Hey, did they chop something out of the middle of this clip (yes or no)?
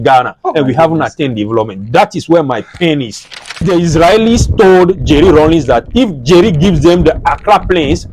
yes